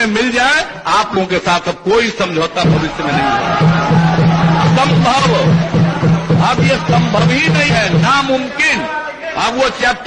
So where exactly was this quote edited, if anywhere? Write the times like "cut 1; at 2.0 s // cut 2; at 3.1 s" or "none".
none

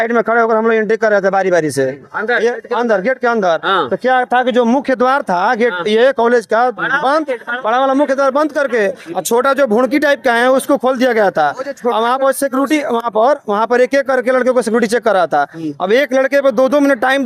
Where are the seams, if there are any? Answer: none

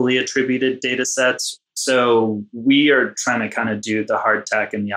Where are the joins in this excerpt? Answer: cut 1; at 1.5 s // cut 2; at 2.5 s

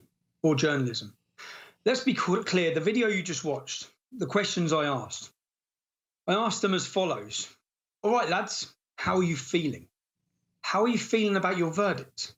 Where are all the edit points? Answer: none

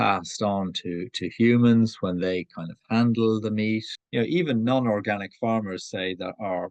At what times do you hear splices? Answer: cut 1; at 4.0 s

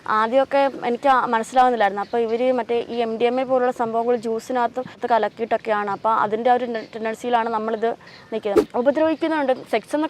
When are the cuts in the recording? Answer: cut 1; at 5.0 s // cut 2; at 8.6 s

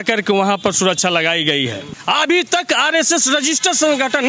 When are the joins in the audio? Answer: cut 1; at 1.9 s

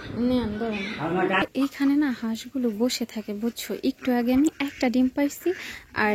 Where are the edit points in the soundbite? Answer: cut 1; at 1.5 s

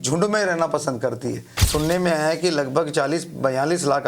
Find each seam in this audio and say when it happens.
cut 1; at 1.6 s

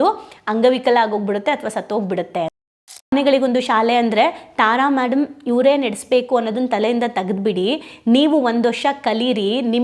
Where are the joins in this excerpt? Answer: cut 1; at 3.1 s

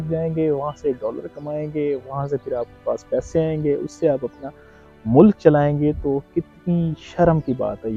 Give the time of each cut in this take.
none

